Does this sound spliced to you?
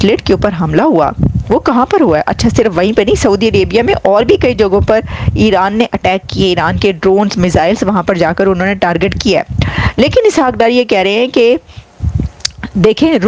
no; 0 cuts

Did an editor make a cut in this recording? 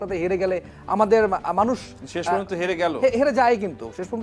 no; 0 cuts

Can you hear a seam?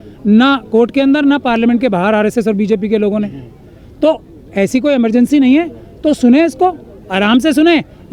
no; 0 cuts

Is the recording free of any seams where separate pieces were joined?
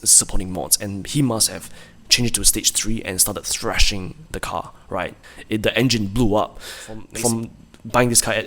no; 2 cuts; at 4.2 s, 7.1 s

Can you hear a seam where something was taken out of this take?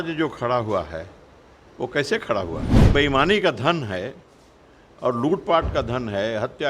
yes; 1 cut; at 2.7 s

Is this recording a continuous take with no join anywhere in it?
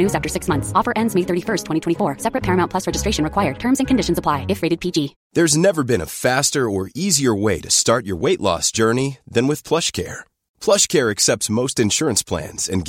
no; 1 cut; at 5.2 s

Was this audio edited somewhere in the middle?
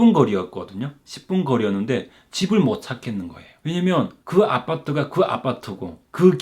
no; 0 cuts

